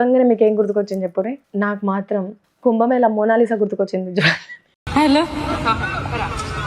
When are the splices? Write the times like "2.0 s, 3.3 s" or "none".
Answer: 1.4 s, 2.4 s